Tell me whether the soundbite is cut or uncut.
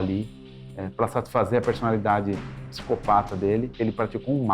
uncut